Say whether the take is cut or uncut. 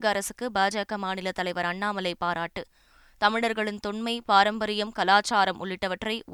uncut